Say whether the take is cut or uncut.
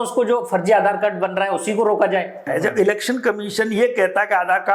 cut